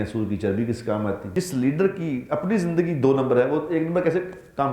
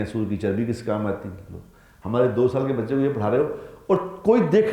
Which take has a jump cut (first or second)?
first